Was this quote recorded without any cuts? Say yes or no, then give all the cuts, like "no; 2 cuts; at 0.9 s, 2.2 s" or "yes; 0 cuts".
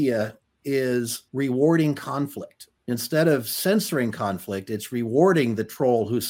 yes; 0 cuts